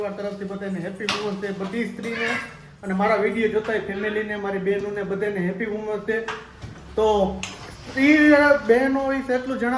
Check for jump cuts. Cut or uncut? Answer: uncut